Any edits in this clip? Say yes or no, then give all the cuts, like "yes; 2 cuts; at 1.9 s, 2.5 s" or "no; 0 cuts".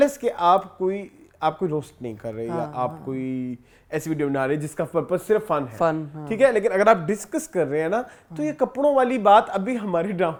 no; 0 cuts